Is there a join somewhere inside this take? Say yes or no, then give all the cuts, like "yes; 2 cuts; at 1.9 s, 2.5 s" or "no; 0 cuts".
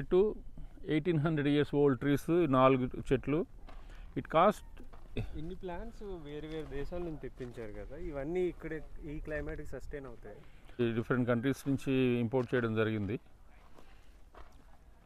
yes; 2 cuts; at 5.3 s, 10.8 s